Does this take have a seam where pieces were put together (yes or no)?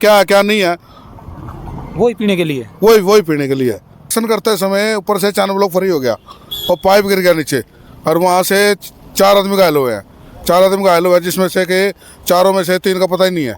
yes